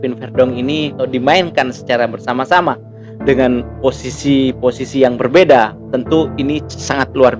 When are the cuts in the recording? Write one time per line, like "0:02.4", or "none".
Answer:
0:01.0